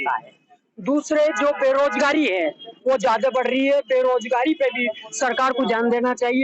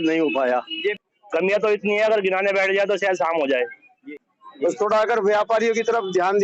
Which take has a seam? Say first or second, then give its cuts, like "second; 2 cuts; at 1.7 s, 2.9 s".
second; 2 cuts; at 1.0 s, 4.0 s